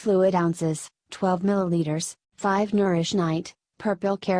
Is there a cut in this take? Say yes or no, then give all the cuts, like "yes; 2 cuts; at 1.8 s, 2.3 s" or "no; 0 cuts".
yes; 1 cut; at 2.5 s